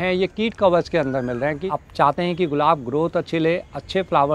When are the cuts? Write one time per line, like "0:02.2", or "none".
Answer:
0:01.7